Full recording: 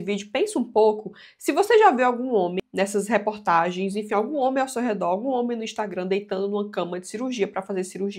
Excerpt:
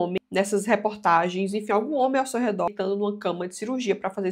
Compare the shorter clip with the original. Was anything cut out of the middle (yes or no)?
yes